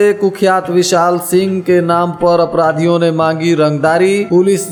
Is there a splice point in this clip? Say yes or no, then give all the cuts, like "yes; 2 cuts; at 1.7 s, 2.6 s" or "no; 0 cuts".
no; 0 cuts